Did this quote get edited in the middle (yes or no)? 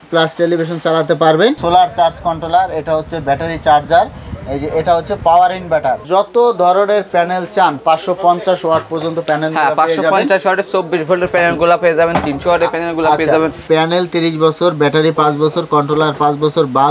yes